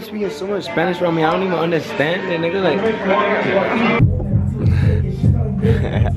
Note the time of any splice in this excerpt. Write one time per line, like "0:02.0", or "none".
none